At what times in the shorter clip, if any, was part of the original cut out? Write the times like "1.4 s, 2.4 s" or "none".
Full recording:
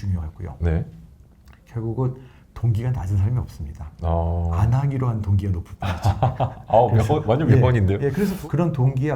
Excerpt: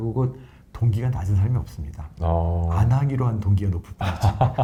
none